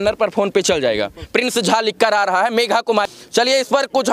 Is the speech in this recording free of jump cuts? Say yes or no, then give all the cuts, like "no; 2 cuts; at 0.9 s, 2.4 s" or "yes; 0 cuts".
no; 1 cut; at 3.1 s